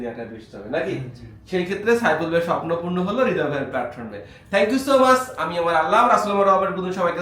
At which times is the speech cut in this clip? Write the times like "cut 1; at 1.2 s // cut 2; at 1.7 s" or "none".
none